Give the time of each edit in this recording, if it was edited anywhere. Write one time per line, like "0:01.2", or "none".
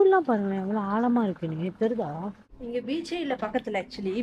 0:02.5